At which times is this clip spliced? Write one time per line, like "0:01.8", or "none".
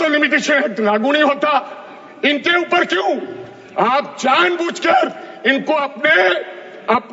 none